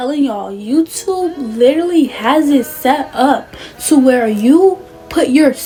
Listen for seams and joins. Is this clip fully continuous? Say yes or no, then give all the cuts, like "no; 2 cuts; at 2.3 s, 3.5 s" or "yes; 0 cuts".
yes; 0 cuts